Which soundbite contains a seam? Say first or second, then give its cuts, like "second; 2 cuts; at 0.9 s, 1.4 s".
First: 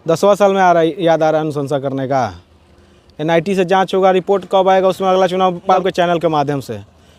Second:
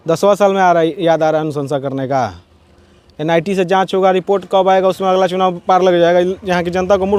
first; 1 cut; at 5.8 s